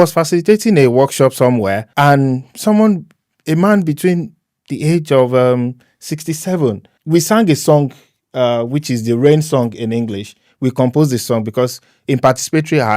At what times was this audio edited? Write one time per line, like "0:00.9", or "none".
0:01.8
0:06.9

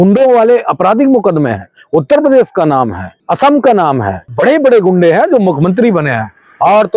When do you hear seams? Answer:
0:03.2
0:04.2

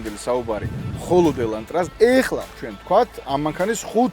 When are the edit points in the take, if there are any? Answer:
0:01.9

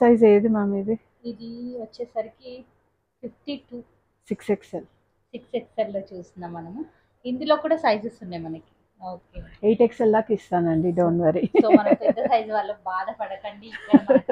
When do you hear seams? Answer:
none

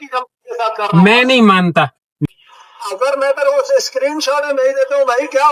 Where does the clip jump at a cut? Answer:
0:02.3

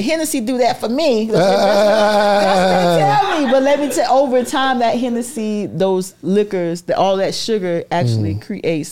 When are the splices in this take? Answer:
none

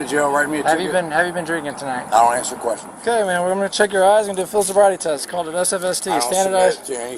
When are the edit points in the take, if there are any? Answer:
0:02.9

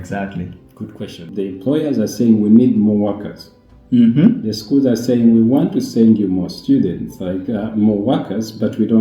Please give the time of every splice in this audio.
0:01.3

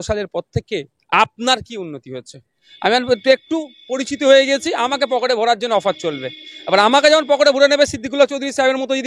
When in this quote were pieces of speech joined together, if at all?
0:02.6

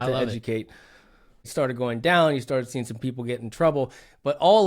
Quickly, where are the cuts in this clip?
0:01.5

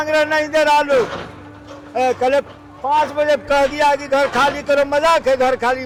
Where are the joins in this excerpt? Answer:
none

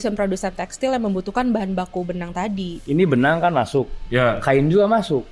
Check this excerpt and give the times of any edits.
0:02.7

